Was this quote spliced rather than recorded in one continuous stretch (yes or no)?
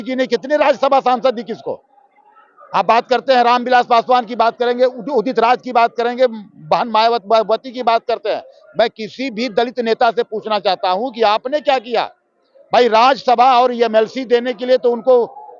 no